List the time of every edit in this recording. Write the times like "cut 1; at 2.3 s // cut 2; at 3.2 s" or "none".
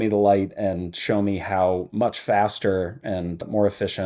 none